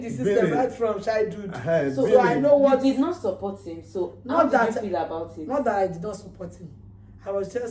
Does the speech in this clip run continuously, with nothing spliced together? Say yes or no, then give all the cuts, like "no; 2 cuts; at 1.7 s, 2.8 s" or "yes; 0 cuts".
yes; 0 cuts